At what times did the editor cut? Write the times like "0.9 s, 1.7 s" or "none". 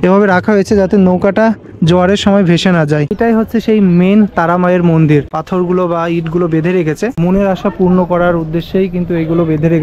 3.1 s, 5.4 s, 7.1 s